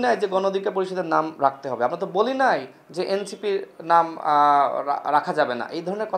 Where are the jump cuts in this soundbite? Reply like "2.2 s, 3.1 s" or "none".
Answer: none